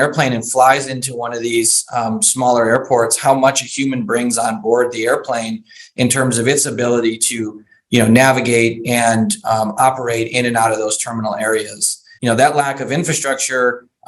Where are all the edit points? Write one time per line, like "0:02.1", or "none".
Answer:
0:12.1

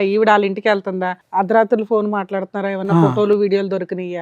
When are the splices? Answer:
0:01.1

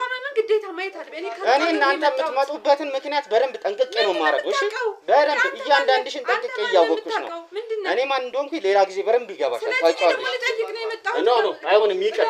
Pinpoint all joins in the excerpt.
none

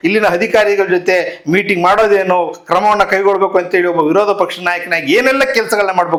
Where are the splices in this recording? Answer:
none

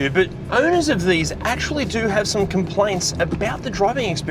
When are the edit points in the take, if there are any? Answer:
none

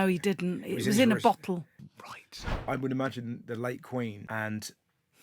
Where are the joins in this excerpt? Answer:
0:02.3
0:04.2

